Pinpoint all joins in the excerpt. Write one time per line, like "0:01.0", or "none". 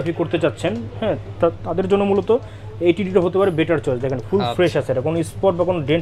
none